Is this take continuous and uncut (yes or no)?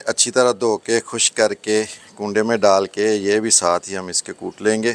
yes